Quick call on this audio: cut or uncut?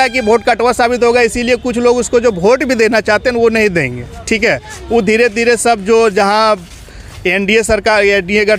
uncut